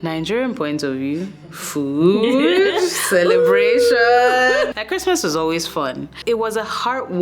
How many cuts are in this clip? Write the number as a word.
one